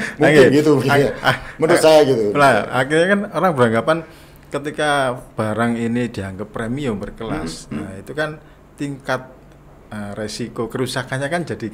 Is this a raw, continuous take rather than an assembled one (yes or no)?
yes